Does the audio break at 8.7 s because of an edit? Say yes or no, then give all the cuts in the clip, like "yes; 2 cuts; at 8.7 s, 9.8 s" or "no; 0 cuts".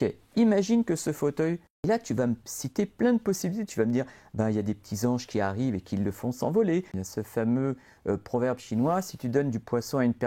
no; 2 cuts; at 1.9 s, 7.0 s